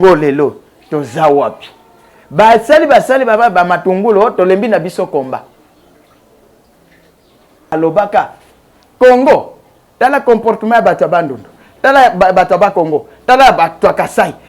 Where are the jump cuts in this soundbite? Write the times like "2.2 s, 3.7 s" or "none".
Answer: 7.7 s